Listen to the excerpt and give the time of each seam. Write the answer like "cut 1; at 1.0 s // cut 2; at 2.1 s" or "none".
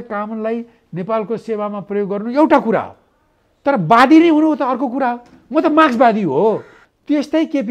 cut 1; at 6.8 s

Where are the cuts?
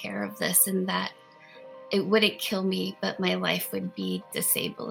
none

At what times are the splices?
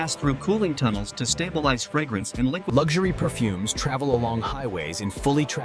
cut 1; at 2.7 s

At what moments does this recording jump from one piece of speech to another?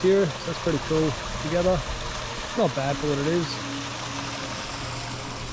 none

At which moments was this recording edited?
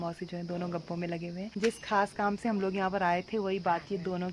cut 1; at 1.5 s

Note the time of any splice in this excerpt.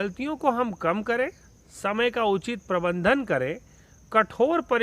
none

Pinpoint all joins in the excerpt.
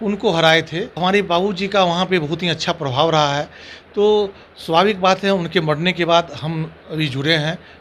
cut 1; at 0.9 s

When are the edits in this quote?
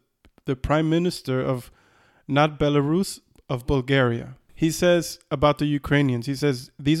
cut 1; at 4.4 s

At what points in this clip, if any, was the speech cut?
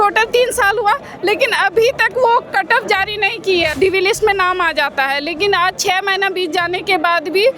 cut 1; at 3.7 s

